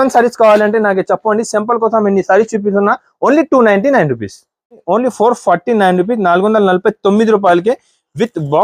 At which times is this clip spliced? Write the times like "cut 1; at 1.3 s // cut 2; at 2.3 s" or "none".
cut 1; at 4.8 s

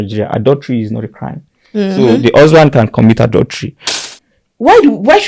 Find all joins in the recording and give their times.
cut 1; at 4.0 s

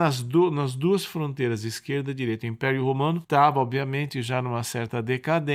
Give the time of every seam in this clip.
cut 1; at 3.2 s

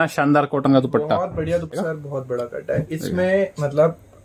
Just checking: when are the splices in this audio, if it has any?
cut 1; at 1.7 s

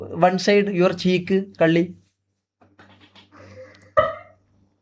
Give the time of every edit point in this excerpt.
none

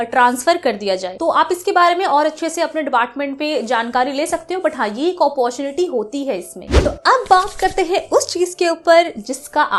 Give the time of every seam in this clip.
none

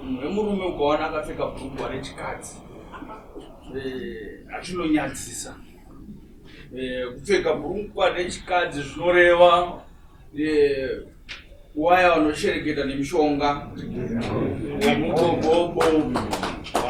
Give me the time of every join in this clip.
none

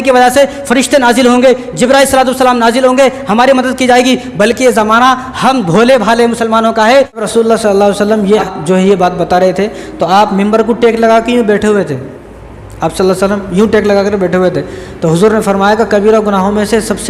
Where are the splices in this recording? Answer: cut 1; at 7.2 s // cut 2; at 8.5 s

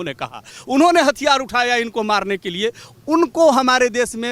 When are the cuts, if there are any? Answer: none

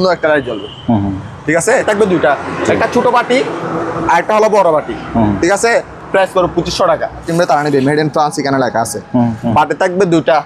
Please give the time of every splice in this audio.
cut 1; at 1.8 s // cut 2; at 7.3 s // cut 3; at 9.4 s

